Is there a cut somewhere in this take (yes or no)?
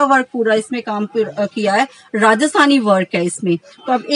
no